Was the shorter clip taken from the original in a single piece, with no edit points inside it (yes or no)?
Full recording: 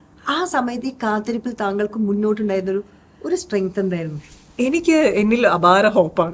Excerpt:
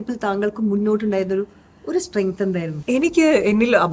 no